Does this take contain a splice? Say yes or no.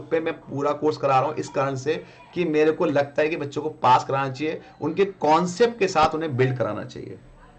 no